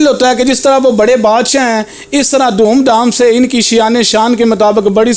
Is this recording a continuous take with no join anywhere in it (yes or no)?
yes